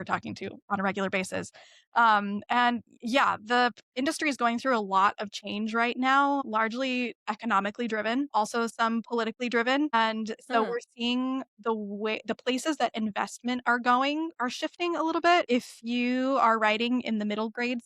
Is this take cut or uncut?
cut